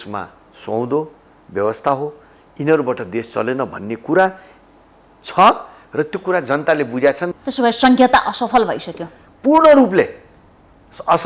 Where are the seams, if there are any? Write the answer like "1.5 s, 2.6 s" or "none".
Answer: 7.2 s